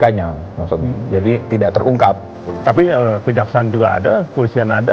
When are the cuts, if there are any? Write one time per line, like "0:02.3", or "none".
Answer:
0:02.3